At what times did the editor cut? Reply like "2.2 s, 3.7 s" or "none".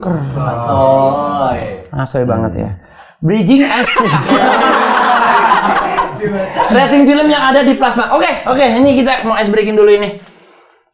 none